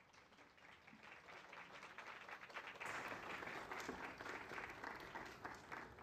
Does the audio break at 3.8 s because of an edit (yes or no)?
yes